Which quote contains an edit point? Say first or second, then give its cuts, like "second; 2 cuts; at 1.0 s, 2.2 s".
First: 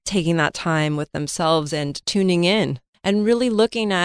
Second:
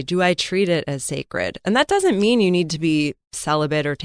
first; 1 cut; at 2.8 s